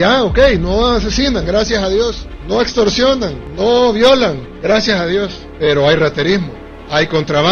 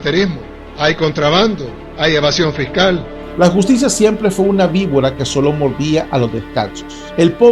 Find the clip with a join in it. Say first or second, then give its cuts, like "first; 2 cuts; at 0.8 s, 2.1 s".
second; 1 cut; at 3.1 s